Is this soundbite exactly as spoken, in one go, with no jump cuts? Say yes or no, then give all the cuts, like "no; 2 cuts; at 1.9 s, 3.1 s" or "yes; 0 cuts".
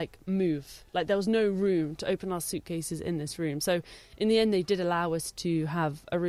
yes; 0 cuts